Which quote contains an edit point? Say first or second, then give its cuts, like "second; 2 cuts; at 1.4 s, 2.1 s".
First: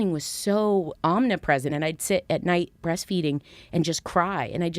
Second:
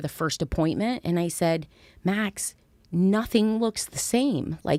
first; 2 cuts; at 0.9 s, 1.7 s